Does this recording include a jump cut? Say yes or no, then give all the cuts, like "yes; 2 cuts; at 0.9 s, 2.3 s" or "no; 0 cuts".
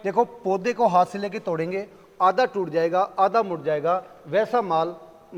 no; 0 cuts